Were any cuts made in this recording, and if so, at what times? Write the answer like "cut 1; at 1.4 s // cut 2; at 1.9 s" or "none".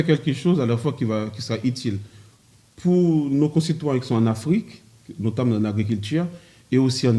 none